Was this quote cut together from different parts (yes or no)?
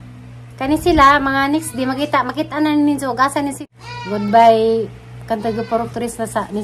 yes